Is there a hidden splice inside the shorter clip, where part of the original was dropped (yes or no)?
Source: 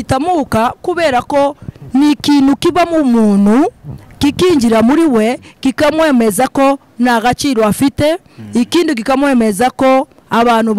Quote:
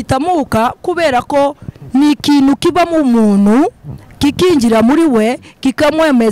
no